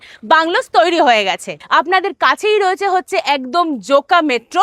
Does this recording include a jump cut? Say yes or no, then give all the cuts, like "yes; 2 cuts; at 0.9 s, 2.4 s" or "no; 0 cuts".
yes; 1 cut; at 1.5 s